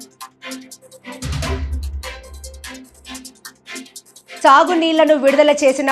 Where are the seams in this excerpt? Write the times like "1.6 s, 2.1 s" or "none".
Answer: 2.3 s